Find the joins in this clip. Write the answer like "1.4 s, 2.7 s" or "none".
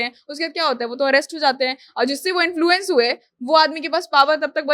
none